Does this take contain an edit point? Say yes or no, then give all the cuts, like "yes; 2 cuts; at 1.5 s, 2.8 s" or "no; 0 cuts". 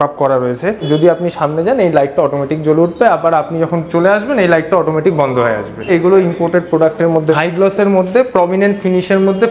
yes; 3 cuts; at 0.8 s, 5.9 s, 7.3 s